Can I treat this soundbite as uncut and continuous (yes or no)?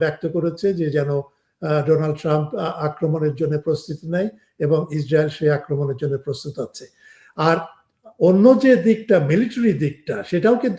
yes